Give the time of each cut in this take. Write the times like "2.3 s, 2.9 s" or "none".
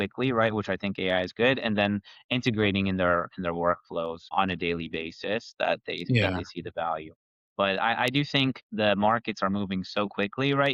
none